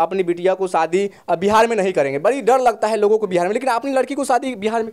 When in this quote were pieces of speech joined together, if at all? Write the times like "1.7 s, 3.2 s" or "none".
none

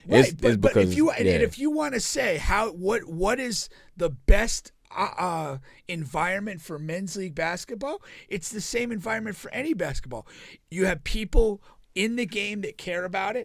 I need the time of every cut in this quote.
none

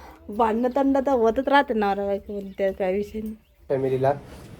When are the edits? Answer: 3.7 s

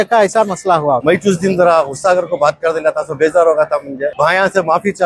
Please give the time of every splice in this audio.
1.1 s, 4.1 s

